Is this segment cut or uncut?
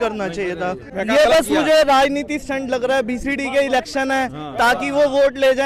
cut